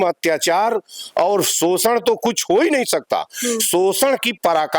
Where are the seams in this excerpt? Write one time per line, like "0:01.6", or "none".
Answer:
none